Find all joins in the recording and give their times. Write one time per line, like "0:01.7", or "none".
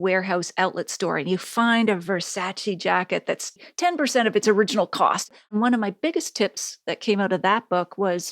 0:05.3